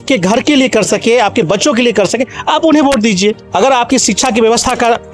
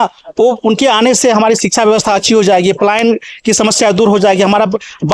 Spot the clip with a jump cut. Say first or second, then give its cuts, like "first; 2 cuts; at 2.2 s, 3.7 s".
first; 1 cut; at 3.4 s